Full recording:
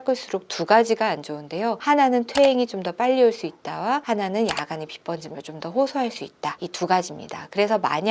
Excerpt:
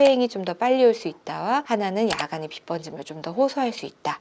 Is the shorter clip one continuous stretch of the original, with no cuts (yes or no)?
yes